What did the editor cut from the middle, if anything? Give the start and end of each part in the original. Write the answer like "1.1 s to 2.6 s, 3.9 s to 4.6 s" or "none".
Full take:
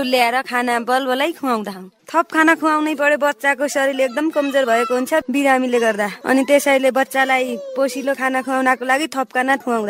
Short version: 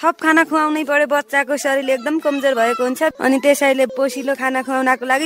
5.3 s to 6.2 s, 6.9 s to 7.7 s